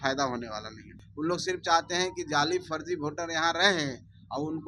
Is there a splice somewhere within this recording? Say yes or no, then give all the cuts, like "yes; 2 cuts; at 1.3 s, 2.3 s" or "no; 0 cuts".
yes; 1 cut; at 1.0 s